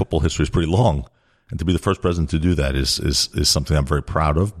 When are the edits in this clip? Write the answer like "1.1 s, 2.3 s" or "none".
none